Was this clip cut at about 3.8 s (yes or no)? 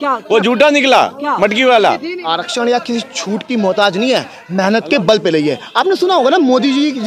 no